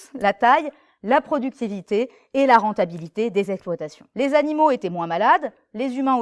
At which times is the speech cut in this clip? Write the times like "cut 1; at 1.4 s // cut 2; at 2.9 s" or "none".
cut 1; at 4.0 s